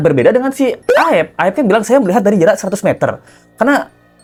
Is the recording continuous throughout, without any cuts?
yes; 0 cuts

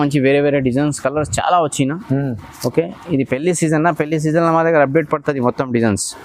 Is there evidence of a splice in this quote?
no; 0 cuts

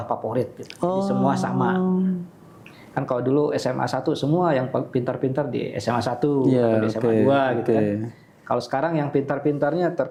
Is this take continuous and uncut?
yes; 0 cuts

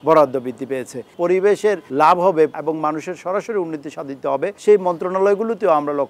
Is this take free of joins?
no; 4 cuts; at 1.1 s, 1.8 s, 2.5 s, 4.6 s

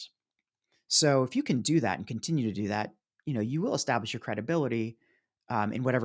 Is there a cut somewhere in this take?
no; 0 cuts

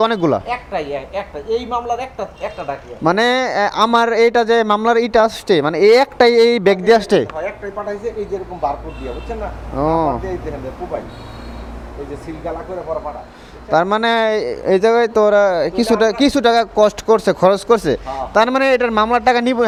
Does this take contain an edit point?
no; 0 cuts

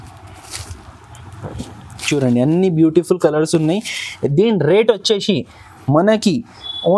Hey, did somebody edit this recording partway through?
no; 0 cuts

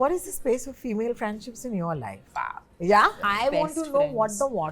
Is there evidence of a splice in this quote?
yes; 2 cuts; at 2.2 s, 3.2 s

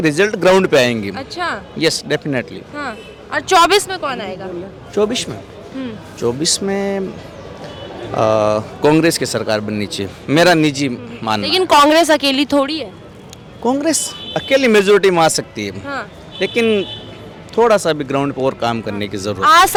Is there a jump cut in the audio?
no; 0 cuts

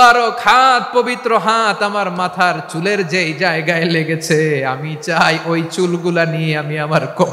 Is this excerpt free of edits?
yes; 0 cuts

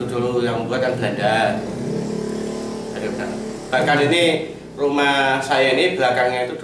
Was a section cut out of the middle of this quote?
no; 0 cuts

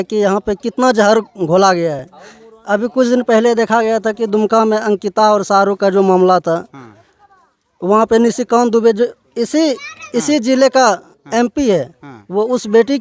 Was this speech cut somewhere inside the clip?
no; 0 cuts

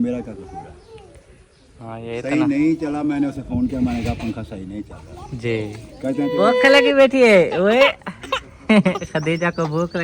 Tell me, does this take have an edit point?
yes; 1 cut; at 6.3 s

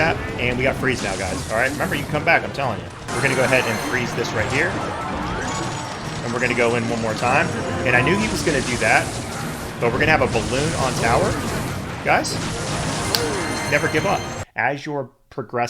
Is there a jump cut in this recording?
yes; 2 cuts; at 3.0 s, 14.4 s

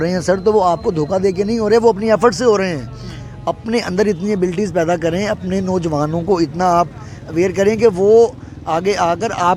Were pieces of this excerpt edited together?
no; 0 cuts

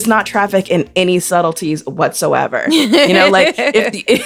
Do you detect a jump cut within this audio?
no; 0 cuts

